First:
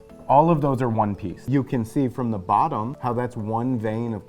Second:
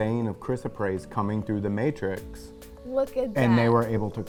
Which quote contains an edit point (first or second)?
first